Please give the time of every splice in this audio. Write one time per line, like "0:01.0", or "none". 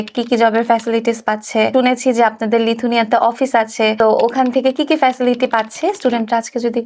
0:01.7
0:04.0